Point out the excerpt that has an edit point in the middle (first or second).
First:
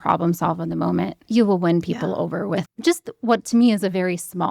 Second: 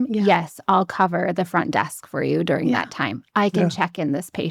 first